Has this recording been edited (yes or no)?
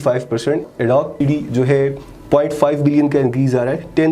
yes